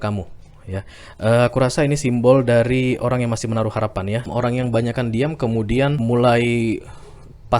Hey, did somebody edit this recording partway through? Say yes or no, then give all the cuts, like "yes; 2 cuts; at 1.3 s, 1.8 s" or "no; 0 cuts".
yes; 2 cuts; at 4.2 s, 6.0 s